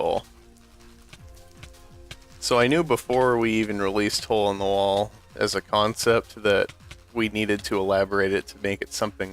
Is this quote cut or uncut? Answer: cut